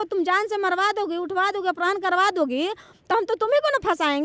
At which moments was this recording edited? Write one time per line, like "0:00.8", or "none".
none